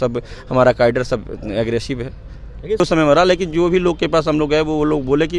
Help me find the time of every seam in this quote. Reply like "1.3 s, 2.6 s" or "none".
2.8 s

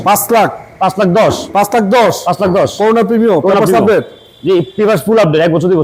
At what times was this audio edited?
none

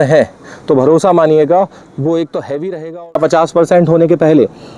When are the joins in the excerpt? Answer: 3.2 s

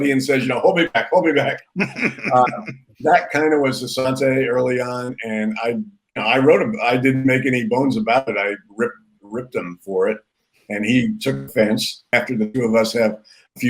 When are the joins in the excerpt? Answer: 12.0 s

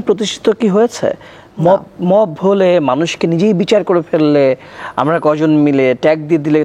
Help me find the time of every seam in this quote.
none

